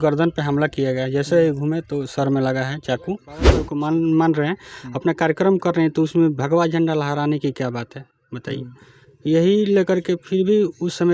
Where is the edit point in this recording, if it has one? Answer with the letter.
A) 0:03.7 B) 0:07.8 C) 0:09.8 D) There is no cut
A